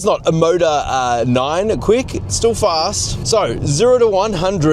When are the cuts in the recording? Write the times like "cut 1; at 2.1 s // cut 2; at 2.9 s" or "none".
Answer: cut 1; at 3.2 s